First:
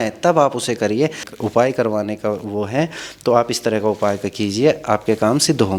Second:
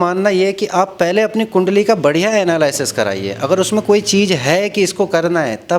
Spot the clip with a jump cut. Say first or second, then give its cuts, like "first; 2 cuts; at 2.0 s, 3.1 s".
first; 1 cut; at 1.2 s